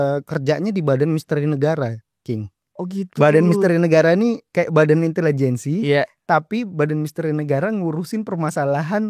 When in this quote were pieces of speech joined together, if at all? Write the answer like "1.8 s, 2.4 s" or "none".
none